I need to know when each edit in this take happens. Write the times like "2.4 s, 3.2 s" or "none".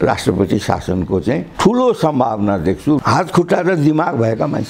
3.0 s